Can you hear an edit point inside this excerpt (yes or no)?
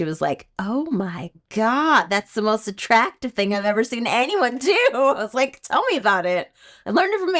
no